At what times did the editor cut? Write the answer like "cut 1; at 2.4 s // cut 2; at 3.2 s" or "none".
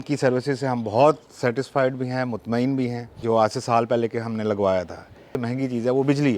cut 1; at 3.1 s // cut 2; at 5.4 s